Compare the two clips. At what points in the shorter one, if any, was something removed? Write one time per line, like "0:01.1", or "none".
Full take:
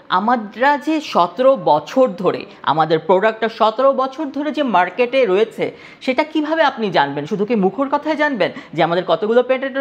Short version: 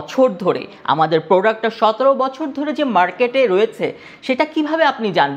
none